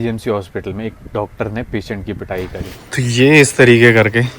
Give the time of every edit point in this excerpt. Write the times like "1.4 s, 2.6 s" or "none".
2.8 s